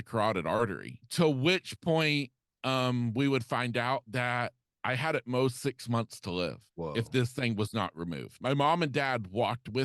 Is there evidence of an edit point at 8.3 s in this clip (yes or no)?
yes